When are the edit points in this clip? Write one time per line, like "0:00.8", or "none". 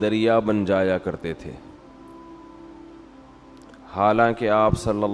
0:01.5
0:03.6